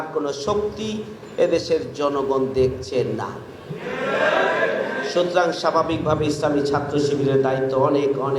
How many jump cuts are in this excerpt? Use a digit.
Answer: 0